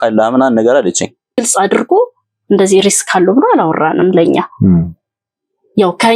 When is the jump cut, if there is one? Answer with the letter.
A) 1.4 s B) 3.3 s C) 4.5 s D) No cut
A